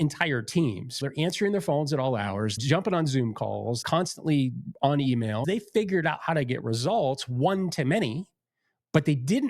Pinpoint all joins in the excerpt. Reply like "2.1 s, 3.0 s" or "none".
1.0 s, 2.6 s, 3.8 s, 5.4 s